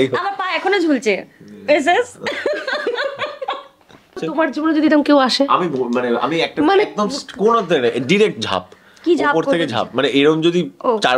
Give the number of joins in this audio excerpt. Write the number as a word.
one